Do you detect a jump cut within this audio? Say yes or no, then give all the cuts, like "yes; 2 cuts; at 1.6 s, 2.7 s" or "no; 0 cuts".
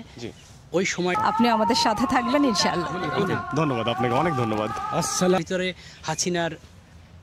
yes; 2 cuts; at 1.2 s, 5.4 s